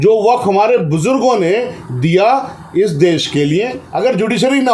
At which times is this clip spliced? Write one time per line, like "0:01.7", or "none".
0:03.8